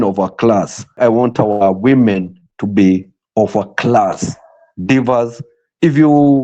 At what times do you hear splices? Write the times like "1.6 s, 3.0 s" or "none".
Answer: 1.0 s